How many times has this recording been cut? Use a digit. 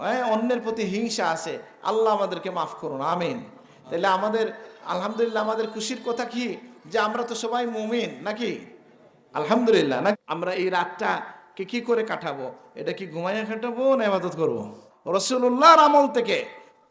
2